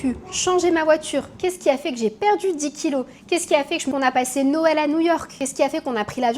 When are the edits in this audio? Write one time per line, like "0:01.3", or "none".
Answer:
0:03.9

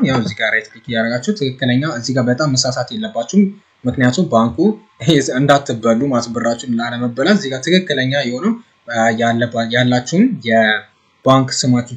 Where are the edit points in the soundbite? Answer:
none

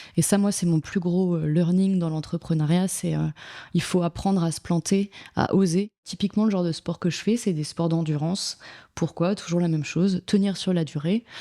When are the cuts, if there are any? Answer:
0:06.1

